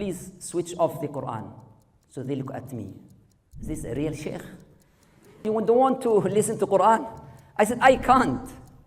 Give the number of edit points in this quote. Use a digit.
1